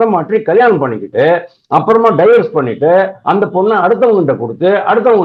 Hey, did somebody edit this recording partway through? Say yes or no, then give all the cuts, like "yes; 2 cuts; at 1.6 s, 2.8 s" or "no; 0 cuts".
no; 0 cuts